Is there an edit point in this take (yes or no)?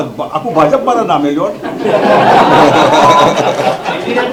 no